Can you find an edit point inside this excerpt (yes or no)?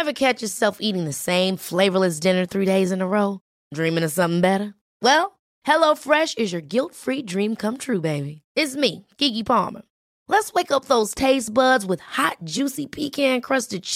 no